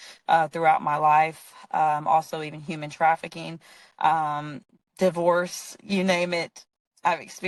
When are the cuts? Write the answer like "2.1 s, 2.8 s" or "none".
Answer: none

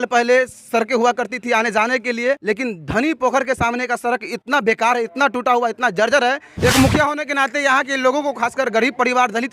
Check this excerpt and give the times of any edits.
2.4 s, 6.4 s

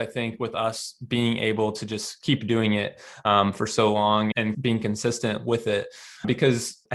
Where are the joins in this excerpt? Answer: none

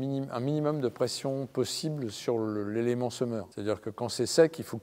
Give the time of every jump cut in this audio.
3.5 s

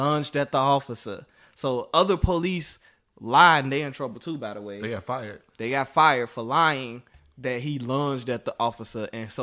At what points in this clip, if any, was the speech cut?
none

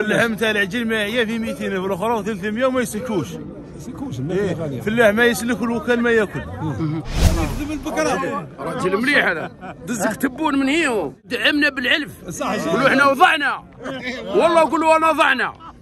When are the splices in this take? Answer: 7.2 s, 11.2 s

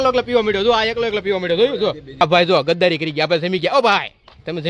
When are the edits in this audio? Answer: 2.2 s

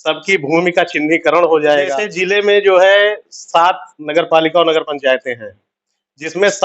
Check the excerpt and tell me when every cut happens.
2.1 s

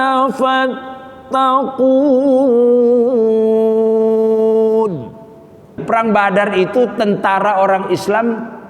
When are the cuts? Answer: 5.8 s

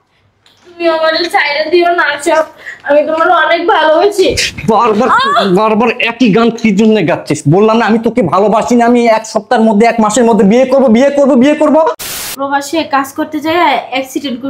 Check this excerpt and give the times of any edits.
12.1 s

